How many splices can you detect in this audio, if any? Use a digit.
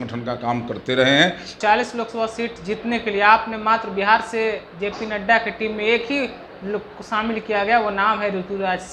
1